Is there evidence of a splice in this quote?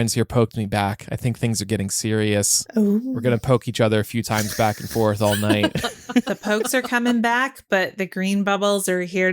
yes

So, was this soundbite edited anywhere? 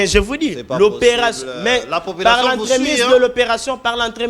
no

